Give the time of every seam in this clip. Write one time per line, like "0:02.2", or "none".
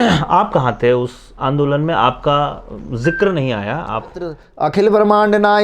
0:04.4